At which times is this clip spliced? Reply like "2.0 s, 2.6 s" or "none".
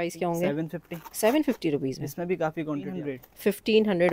3.0 s